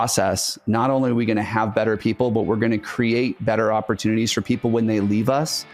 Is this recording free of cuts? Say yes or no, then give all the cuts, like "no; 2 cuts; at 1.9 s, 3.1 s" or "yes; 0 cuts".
yes; 0 cuts